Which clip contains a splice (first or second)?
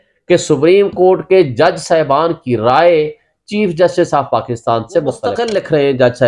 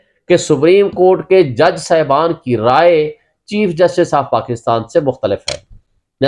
first